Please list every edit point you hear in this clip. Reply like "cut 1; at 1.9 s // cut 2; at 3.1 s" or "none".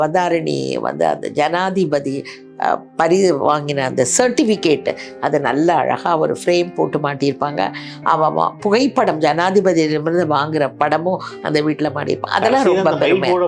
none